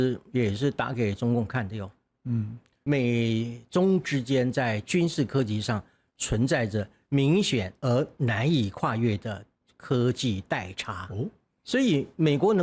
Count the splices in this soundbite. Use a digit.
2